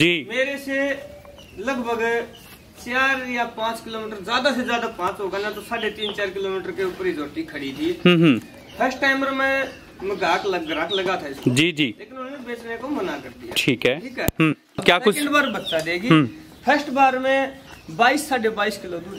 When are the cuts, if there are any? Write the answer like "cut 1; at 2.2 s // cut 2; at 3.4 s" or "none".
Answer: cut 1; at 14.7 s